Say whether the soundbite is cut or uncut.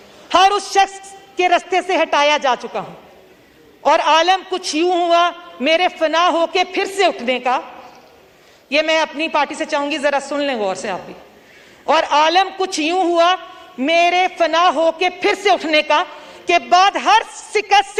uncut